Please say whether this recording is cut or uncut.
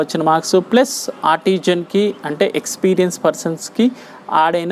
uncut